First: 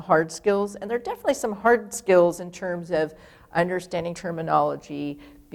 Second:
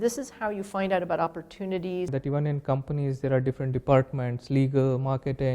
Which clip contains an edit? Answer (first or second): second